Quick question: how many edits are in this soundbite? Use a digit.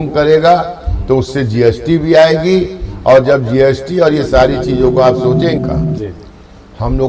1